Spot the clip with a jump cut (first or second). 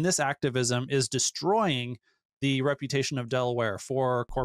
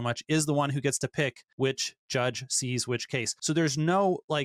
second